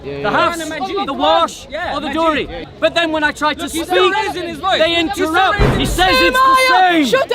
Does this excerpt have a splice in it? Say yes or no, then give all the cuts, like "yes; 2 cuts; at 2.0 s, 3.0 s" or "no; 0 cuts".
yes; 2 cuts; at 2.6 s, 5.7 s